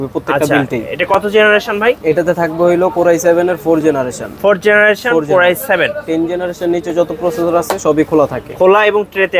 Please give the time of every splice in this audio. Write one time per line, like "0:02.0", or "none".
none